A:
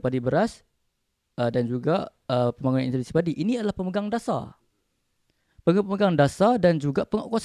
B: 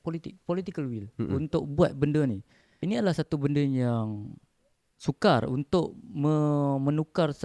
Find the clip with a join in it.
B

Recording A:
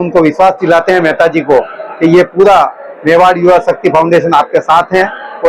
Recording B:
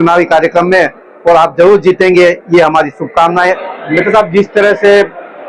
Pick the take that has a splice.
B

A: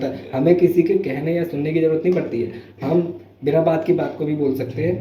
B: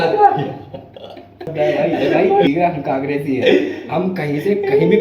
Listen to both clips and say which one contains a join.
B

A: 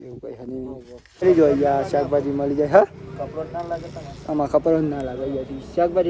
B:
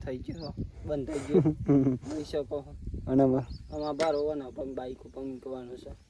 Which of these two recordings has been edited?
A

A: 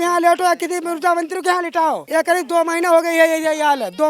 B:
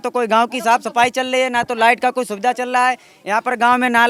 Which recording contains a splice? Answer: A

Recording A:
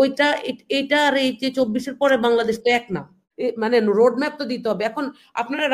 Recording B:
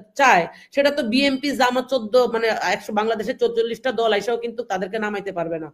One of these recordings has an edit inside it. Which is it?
A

